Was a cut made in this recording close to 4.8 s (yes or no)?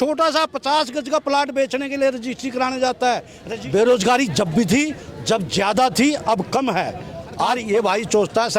no